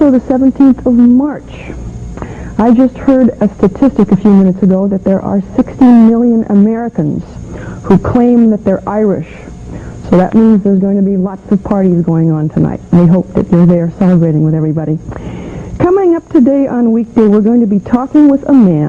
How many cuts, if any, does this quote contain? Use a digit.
1